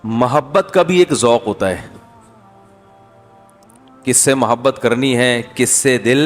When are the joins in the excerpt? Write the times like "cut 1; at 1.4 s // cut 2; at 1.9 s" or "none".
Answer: none